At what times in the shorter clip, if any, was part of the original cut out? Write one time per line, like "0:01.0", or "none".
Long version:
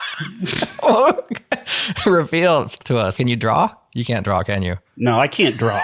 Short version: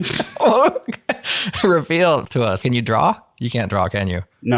0:02.3